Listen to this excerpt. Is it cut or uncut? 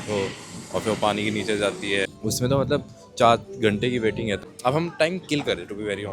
cut